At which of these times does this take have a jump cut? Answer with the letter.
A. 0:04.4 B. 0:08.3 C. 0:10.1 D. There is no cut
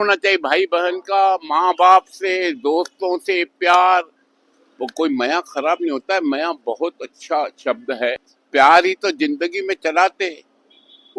B